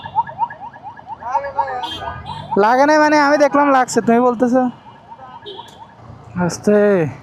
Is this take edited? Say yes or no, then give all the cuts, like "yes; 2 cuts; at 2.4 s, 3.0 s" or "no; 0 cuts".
yes; 1 cut; at 6.0 s